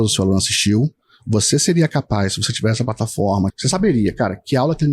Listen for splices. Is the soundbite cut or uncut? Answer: cut